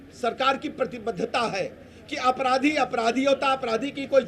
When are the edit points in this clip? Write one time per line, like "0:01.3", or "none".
none